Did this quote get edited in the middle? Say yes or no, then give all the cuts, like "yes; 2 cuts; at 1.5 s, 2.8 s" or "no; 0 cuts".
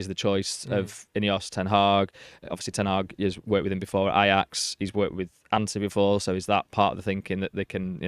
no; 0 cuts